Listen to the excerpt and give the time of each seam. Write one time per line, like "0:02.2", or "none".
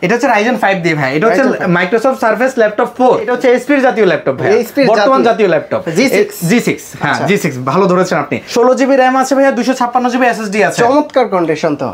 0:03.3
0:08.4